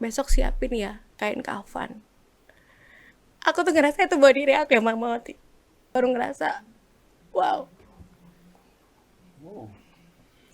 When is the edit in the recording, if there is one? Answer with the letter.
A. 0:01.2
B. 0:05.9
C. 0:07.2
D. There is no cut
B